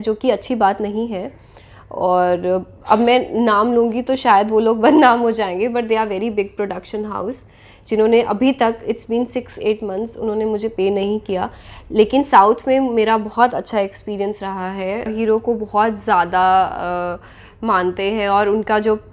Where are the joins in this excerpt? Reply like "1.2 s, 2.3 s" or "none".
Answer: 15.1 s